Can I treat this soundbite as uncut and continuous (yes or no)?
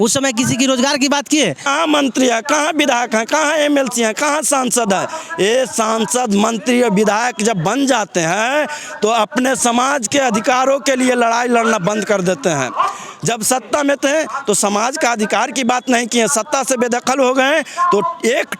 no